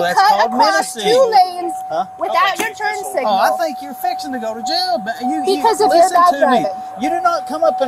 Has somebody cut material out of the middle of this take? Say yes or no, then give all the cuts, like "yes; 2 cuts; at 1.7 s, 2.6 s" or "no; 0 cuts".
no; 0 cuts